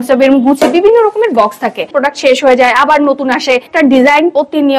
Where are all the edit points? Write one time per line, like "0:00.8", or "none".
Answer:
0:01.9
0:03.7